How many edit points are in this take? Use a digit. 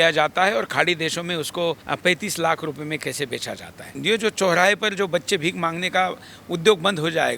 2